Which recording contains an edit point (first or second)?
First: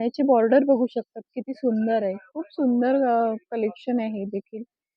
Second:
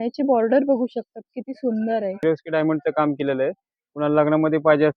second